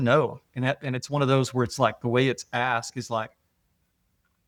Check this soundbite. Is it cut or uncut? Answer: uncut